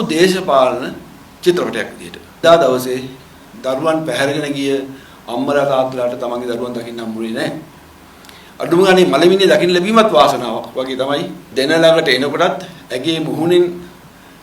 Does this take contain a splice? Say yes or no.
yes